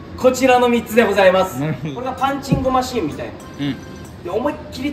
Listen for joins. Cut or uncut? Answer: cut